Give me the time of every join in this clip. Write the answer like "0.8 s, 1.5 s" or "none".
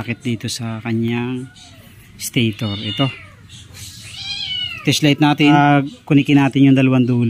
5.6 s